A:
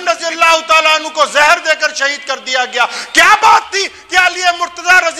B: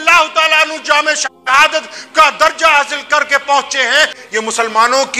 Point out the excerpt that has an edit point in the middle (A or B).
B